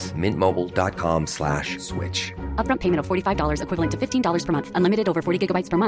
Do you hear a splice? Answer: no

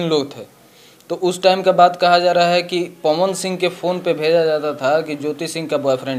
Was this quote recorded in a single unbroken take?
yes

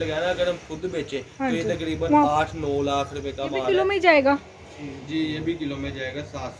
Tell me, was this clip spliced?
yes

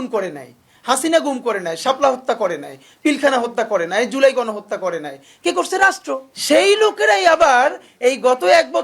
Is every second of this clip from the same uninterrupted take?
yes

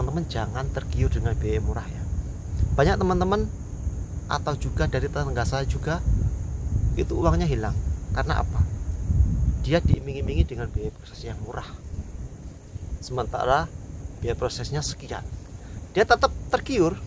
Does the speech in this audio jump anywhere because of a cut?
no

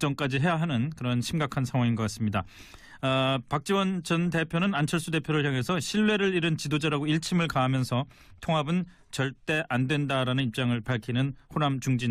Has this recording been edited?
no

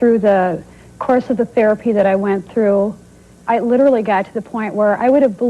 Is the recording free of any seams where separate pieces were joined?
no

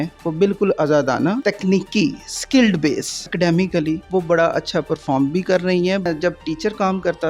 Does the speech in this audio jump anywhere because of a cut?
yes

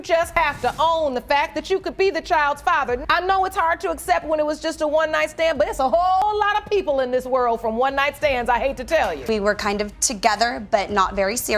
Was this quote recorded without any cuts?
no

